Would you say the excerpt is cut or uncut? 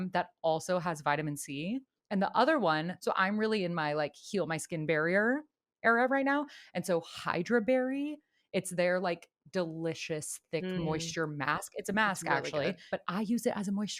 cut